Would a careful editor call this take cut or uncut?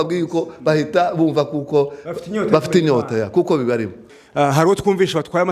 cut